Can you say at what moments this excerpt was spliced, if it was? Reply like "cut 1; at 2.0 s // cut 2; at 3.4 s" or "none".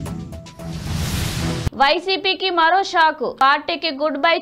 cut 1; at 1.7 s